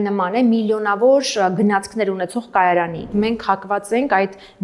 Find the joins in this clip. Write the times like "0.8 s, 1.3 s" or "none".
3.1 s